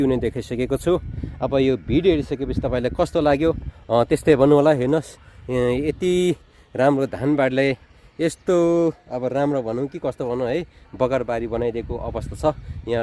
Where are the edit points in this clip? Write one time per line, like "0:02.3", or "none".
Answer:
none